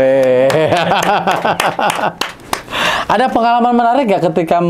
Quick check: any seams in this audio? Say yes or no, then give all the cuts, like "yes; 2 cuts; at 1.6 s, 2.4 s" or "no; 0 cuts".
no; 0 cuts